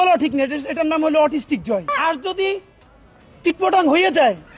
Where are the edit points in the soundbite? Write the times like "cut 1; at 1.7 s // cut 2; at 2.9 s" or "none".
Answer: cut 1; at 1.9 s